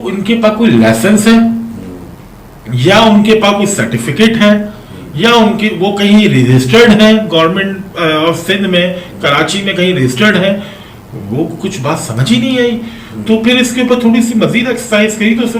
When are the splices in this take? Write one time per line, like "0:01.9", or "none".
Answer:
none